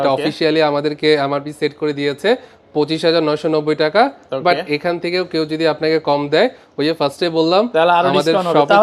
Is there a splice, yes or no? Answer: no